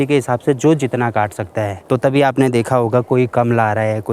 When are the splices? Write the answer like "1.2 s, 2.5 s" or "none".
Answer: none